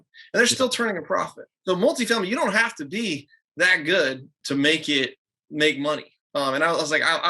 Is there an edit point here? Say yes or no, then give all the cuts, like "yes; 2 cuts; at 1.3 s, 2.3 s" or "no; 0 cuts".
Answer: yes; 2 cuts; at 1.5 s, 4.4 s